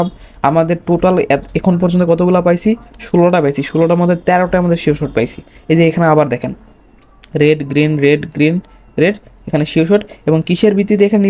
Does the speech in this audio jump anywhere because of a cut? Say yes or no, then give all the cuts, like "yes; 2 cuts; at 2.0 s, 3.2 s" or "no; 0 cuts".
no; 0 cuts